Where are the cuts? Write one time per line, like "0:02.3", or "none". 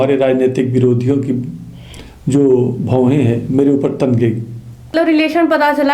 0:04.9